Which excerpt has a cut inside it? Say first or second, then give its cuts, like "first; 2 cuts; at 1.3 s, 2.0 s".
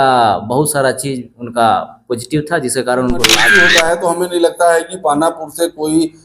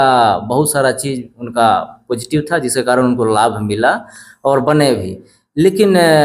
first; 1 cut; at 3.4 s